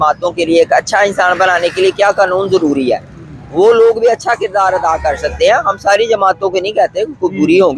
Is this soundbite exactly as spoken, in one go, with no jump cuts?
yes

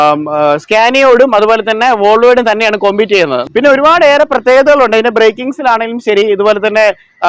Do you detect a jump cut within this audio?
yes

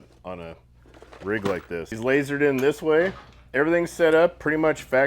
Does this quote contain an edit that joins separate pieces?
yes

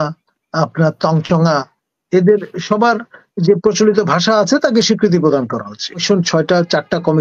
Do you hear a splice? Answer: yes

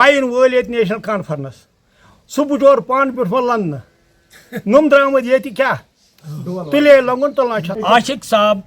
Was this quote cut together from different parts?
yes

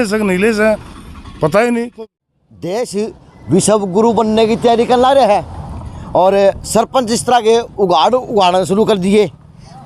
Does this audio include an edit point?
yes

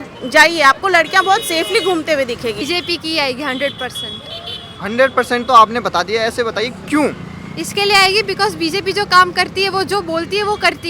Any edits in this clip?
yes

